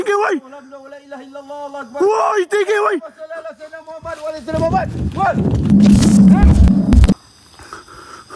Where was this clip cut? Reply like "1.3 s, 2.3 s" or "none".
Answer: 5.7 s, 7.2 s